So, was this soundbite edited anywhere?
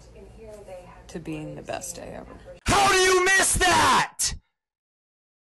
yes; 1 cut; at 2.6 s

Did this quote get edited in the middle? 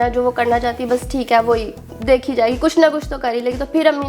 no; 0 cuts

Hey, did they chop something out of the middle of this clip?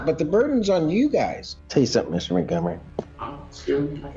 yes; 1 cut; at 1.4 s

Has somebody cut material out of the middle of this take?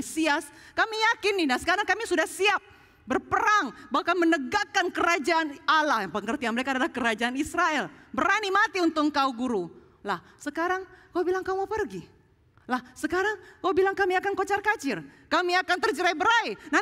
no; 0 cuts

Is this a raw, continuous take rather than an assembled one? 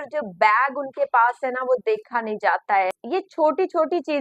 no; 1 cut; at 3.0 s

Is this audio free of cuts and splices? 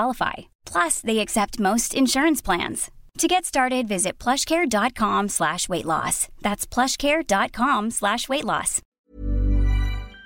no; 1 cut; at 9.0 s

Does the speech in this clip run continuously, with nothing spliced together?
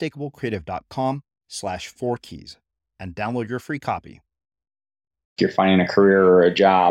no; 1 cut; at 5.4 s

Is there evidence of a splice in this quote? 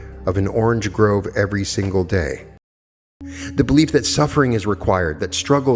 yes; 1 cut; at 2.7 s

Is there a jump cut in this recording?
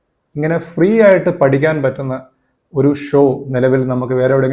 no; 0 cuts

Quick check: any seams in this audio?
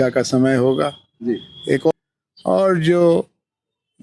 yes; 1 cut; at 1.9 s

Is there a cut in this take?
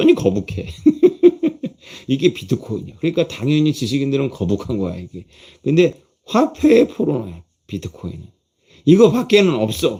no; 0 cuts

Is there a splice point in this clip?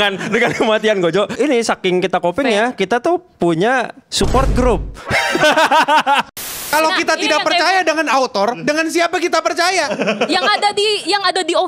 yes; 1 cut; at 6.3 s

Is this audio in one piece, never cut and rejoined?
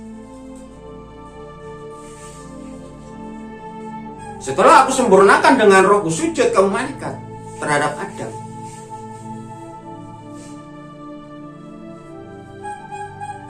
yes; 0 cuts

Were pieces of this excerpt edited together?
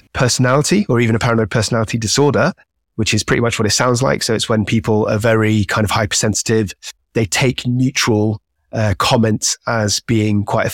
no; 0 cuts

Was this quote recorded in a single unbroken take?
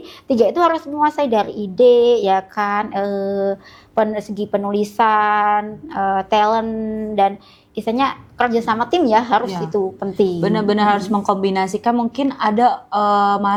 yes; 0 cuts

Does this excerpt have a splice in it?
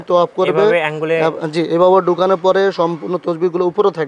no; 0 cuts

